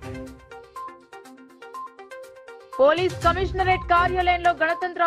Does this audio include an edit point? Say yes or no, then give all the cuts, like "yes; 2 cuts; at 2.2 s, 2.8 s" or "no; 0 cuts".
yes; 1 cut; at 1.0 s